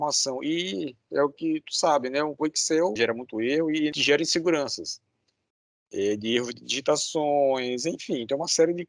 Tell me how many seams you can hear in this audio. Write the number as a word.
two